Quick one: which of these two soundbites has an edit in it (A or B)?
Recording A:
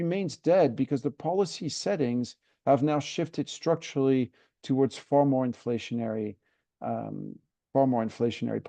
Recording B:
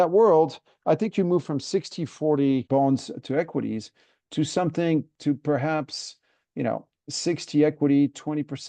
B